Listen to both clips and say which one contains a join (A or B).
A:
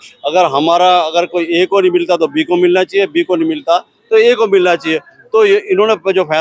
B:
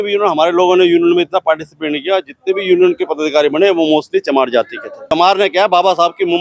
B